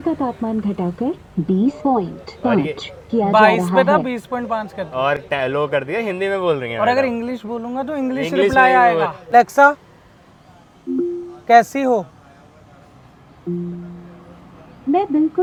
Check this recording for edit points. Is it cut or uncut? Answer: uncut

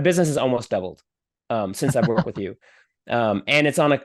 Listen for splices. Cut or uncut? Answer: uncut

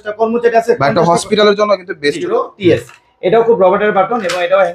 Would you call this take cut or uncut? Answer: cut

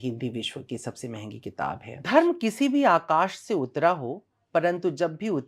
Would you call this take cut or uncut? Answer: cut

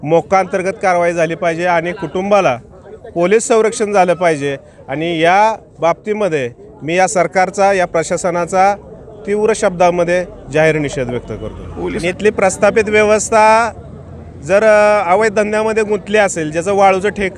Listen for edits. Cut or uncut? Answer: cut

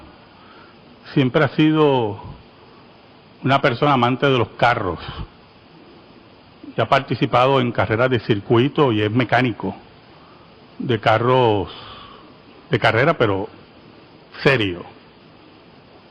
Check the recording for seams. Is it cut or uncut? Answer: cut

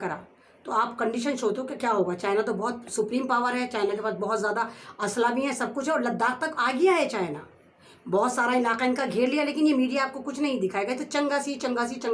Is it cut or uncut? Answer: uncut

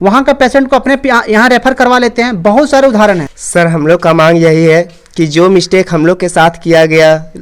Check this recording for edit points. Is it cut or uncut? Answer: cut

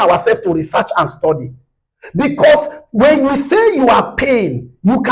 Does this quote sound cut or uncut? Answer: uncut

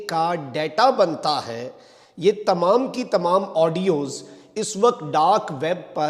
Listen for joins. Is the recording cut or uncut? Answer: uncut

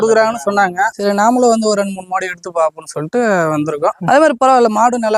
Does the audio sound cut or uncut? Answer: cut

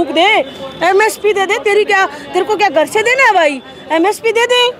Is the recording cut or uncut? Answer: uncut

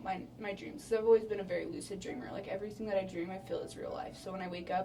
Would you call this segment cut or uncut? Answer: uncut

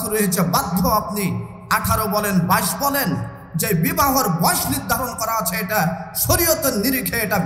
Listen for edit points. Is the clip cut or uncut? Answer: uncut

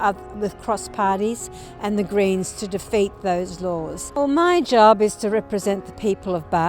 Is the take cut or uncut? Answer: cut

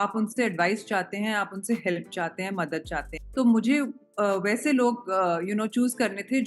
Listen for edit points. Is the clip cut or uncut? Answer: cut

